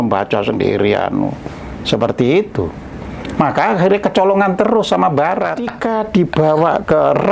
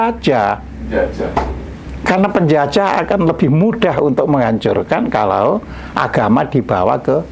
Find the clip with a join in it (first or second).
first